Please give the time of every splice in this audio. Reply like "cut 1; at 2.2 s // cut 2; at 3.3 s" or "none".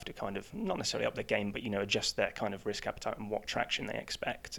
none